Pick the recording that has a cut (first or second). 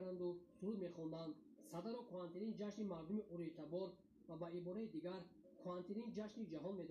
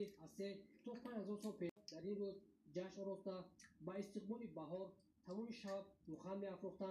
second